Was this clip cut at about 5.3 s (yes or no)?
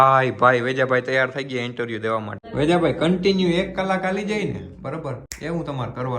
yes